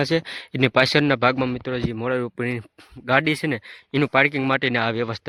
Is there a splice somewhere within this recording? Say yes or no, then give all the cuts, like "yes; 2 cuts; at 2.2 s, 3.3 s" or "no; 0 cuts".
no; 0 cuts